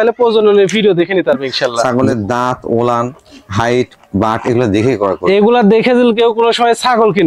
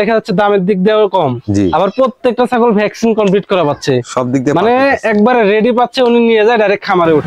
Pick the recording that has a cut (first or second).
first